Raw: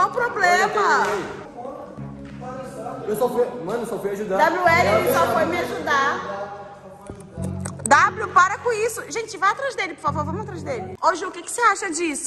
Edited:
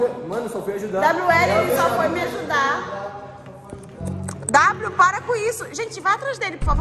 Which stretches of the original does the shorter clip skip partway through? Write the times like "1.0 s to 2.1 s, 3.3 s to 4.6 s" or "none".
none